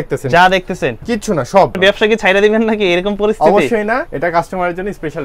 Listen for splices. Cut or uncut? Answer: cut